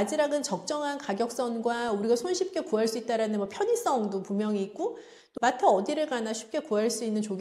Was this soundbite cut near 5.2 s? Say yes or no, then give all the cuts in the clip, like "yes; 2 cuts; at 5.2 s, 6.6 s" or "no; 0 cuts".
yes; 1 cut; at 5.2 s